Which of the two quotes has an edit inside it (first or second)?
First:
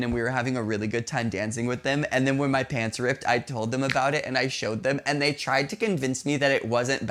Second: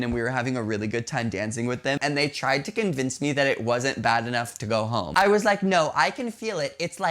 second